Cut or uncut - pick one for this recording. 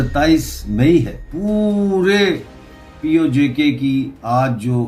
cut